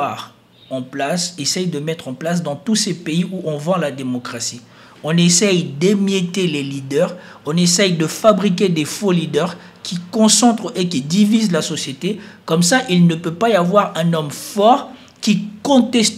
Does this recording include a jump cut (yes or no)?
no